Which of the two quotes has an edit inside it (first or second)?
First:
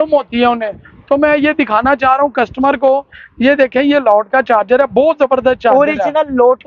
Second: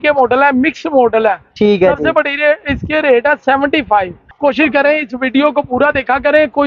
second